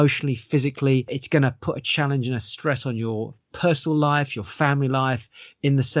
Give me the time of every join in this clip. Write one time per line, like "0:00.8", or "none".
0:01.2